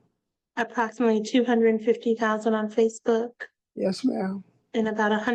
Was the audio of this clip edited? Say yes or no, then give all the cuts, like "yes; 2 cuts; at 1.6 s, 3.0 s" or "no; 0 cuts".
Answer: no; 0 cuts